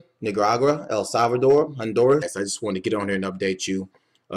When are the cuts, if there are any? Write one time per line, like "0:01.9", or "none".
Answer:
none